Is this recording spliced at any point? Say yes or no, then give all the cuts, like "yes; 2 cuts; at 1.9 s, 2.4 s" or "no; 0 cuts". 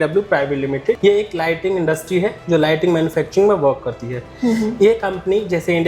yes; 1 cut; at 1.0 s